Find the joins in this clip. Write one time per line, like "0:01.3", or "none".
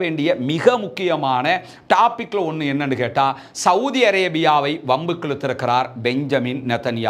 none